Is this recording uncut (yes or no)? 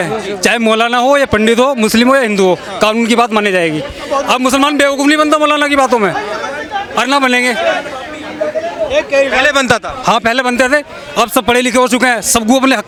yes